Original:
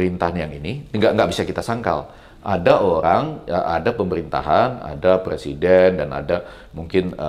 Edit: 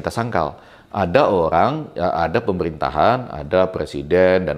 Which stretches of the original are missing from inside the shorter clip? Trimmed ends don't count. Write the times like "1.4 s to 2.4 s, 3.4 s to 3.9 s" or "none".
none